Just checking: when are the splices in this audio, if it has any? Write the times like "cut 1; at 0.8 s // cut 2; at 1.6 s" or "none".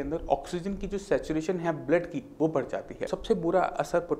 cut 1; at 3.1 s